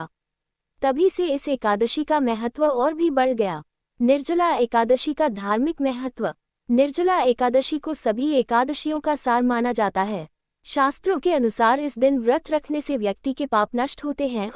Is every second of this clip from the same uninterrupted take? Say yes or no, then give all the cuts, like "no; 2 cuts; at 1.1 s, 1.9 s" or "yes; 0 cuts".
no; 1 cut; at 2.5 s